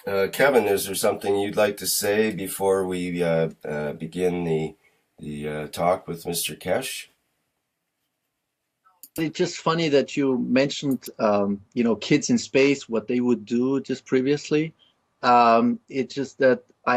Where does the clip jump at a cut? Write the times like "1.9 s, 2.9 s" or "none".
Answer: 12.7 s